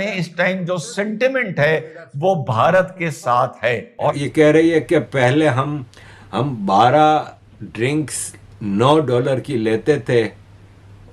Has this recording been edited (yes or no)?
yes